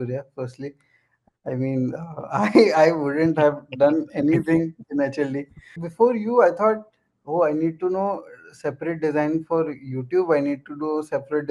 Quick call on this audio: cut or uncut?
cut